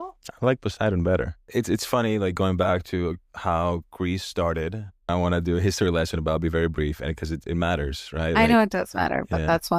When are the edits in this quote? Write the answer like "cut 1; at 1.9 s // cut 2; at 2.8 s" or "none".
cut 1; at 1.4 s // cut 2; at 5.1 s